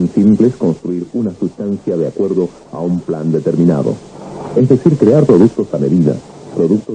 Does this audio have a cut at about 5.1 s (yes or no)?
yes